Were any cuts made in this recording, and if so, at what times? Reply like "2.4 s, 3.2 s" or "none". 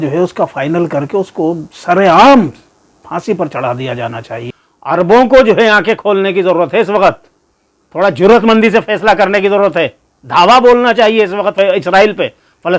4.4 s